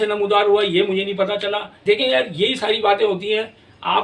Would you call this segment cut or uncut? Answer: uncut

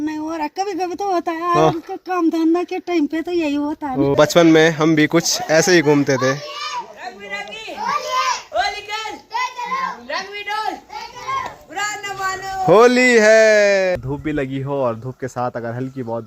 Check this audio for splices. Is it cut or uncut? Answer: cut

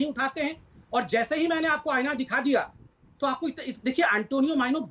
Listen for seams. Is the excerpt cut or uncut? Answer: uncut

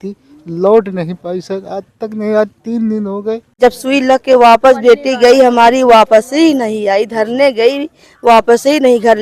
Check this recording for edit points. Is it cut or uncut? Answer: cut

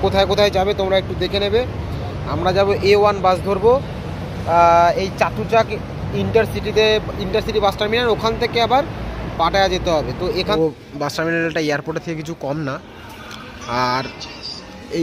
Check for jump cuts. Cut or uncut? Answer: cut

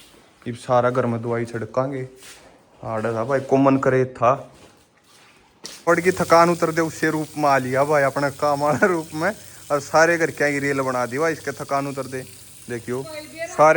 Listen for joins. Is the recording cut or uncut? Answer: cut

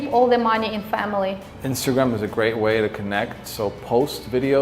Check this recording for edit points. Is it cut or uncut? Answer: cut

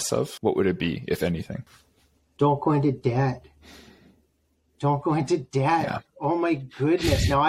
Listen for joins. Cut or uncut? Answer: uncut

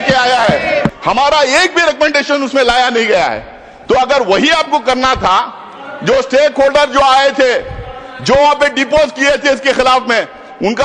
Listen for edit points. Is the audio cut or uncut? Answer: cut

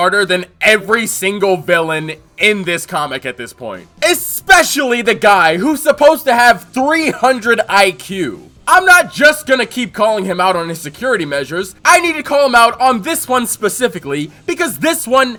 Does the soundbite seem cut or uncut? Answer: uncut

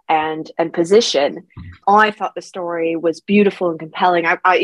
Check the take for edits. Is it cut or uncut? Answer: cut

